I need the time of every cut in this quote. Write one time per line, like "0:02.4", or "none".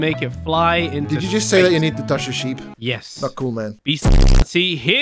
0:02.7
0:03.8

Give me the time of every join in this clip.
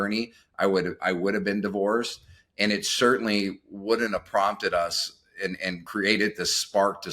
0:05.9

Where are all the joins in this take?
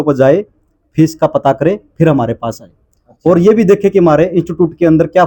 none

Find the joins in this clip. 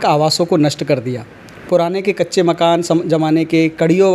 none

